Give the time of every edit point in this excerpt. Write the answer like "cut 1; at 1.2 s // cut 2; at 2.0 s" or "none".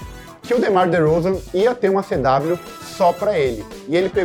none